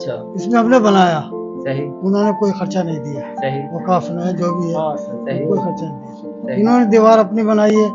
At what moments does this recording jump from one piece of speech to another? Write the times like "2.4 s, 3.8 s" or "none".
none